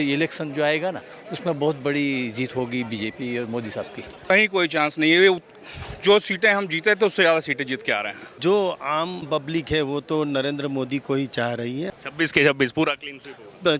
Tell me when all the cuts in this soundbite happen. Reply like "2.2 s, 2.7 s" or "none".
4.1 s, 8.2 s, 11.9 s